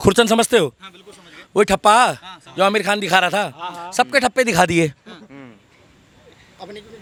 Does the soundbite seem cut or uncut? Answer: uncut